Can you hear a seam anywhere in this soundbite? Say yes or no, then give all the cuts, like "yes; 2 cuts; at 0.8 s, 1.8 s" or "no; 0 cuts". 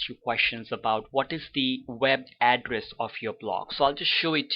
yes; 1 cut; at 2.3 s